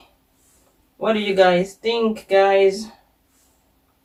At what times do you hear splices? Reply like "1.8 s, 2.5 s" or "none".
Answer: none